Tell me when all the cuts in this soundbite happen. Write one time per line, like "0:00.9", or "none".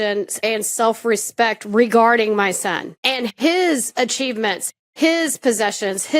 0:02.9